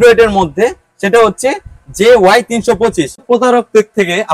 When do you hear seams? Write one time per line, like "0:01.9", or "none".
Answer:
0:03.2